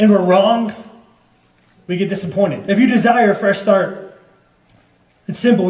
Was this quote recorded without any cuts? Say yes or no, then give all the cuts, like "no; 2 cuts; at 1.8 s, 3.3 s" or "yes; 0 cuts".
no; 1 cut; at 2.6 s